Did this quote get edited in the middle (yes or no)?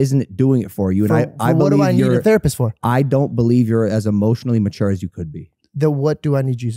no